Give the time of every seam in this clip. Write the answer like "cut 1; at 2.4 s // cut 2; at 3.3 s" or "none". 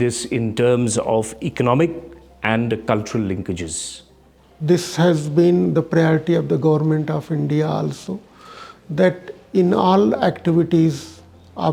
cut 1; at 4.5 s